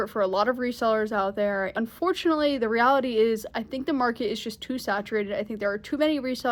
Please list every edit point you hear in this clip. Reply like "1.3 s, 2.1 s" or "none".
1.7 s